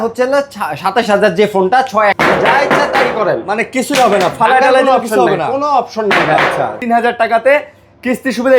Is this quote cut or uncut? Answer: cut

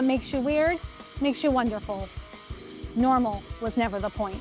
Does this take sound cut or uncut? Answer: uncut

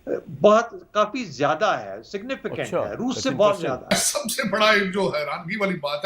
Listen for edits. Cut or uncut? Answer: cut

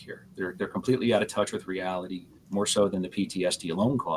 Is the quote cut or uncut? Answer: cut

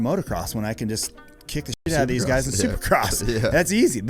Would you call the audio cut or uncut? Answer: uncut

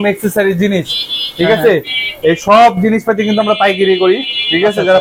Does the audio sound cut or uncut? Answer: uncut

